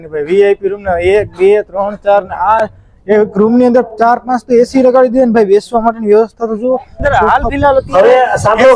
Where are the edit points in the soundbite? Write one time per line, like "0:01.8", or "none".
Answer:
0:06.9